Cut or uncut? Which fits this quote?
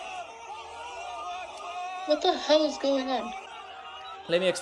cut